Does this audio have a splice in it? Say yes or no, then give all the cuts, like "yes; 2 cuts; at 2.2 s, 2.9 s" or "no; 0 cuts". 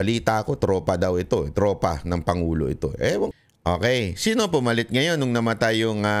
yes; 1 cut; at 3.3 s